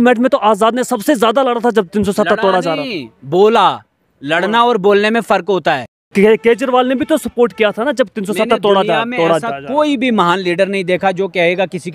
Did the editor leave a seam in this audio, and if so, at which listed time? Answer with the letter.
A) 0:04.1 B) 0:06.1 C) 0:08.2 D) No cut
B